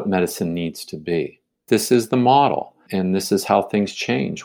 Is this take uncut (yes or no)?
no